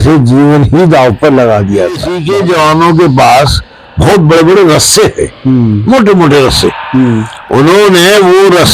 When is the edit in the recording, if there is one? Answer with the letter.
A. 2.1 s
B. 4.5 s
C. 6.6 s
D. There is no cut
A